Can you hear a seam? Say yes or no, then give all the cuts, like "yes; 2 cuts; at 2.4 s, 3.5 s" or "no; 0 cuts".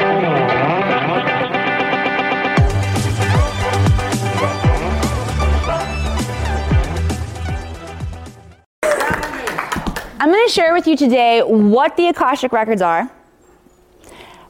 yes; 1 cut; at 1.5 s